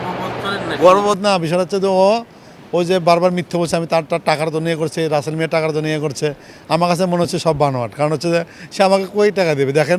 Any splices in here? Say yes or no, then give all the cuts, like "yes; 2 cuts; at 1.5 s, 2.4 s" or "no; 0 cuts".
no; 0 cuts